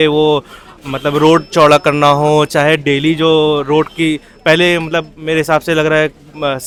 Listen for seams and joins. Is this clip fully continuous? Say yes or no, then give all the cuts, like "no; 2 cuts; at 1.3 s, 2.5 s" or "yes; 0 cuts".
yes; 0 cuts